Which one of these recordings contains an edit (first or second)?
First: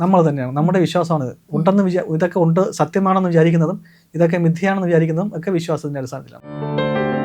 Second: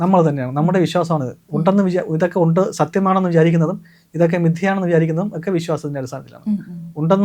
first